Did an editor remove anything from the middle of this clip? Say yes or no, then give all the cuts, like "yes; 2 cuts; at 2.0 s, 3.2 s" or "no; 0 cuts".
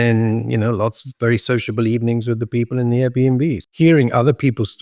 yes; 1 cut; at 3.6 s